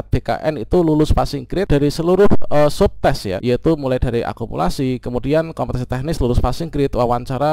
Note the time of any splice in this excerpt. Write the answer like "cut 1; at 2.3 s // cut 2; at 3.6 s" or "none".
cut 1; at 1.7 s // cut 2; at 3.3 s